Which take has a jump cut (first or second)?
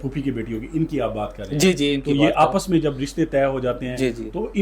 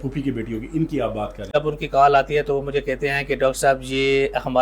second